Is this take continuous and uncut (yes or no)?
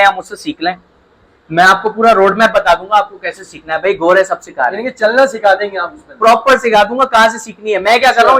yes